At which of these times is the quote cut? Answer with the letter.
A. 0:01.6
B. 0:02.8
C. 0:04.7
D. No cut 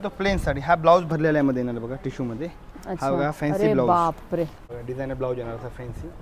C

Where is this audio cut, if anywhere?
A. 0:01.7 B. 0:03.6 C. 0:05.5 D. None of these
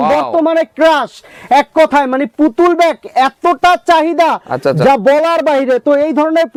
D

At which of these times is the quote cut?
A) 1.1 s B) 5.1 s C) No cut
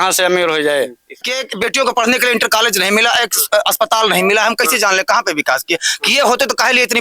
A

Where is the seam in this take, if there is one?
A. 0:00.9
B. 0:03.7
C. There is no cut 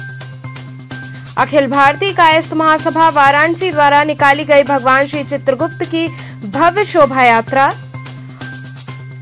C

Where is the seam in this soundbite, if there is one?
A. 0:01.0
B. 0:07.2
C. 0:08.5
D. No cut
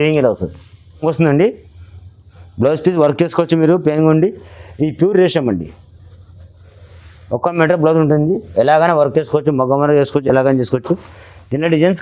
A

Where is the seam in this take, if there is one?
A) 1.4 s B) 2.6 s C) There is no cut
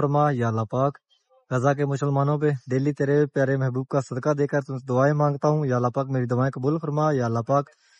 B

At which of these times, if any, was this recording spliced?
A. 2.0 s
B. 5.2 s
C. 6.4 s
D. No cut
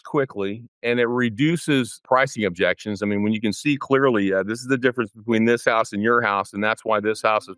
A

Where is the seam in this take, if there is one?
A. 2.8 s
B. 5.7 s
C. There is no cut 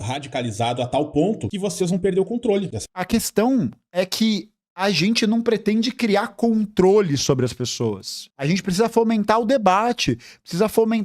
C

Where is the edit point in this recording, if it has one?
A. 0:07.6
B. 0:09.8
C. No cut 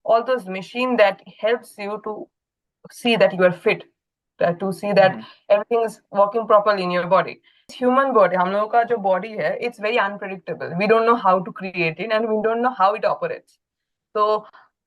A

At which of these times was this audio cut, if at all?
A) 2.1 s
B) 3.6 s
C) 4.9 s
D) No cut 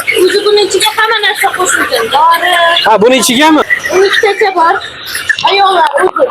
B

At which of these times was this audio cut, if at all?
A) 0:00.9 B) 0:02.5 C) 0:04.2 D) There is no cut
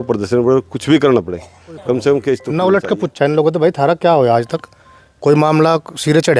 B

